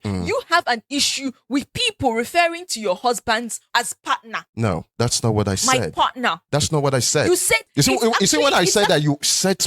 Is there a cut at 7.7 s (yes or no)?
yes